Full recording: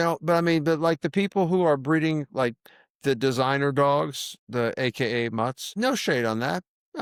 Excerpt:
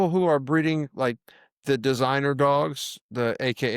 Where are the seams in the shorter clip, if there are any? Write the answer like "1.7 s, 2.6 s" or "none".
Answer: none